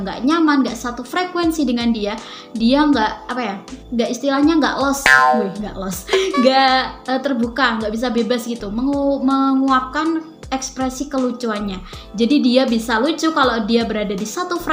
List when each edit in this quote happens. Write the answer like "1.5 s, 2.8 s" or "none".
none

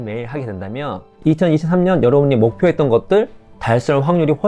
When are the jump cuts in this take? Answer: 1.1 s

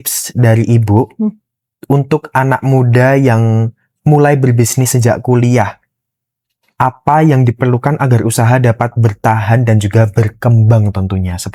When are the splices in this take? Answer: none

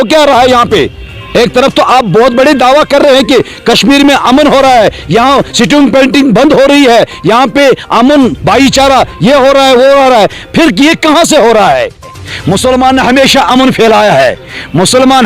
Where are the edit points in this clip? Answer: 12.0 s

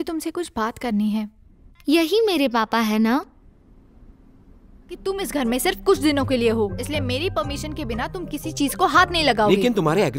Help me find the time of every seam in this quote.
5.1 s

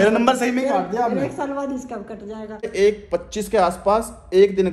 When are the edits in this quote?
2.7 s

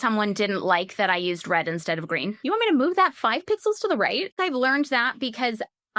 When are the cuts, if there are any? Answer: 2.4 s, 4.3 s

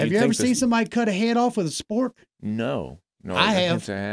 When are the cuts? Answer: none

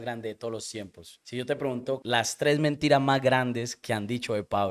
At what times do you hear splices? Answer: 1.2 s

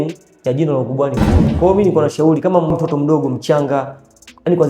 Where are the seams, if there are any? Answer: 1.4 s, 2.7 s

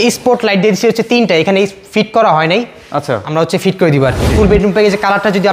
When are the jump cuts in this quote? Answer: 4.3 s

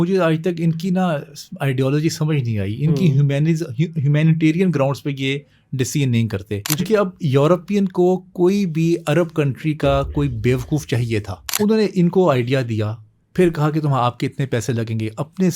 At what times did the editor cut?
6.8 s, 11.4 s

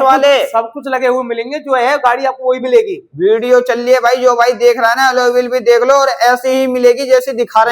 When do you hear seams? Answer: none

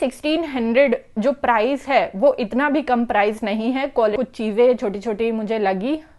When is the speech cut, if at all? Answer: 4.1 s

